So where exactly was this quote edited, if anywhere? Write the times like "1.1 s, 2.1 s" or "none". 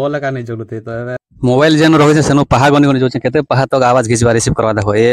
1.2 s